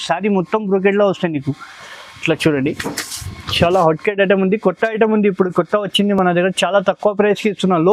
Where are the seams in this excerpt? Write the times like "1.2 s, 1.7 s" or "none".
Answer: none